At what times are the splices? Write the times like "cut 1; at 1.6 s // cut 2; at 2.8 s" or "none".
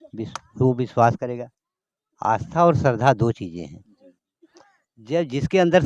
none